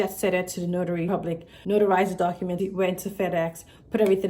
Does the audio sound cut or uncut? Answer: cut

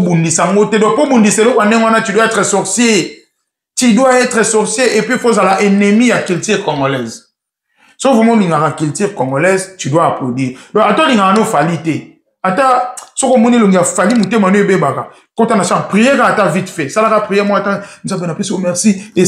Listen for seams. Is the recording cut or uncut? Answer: uncut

